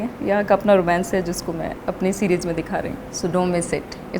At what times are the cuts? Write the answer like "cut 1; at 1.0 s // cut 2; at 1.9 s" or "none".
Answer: cut 1; at 1.8 s // cut 2; at 3.0 s

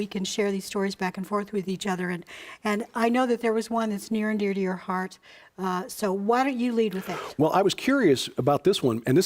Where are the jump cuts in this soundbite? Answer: none

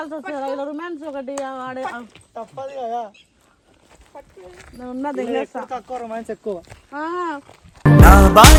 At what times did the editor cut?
none

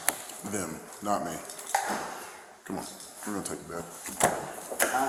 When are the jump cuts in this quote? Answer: none

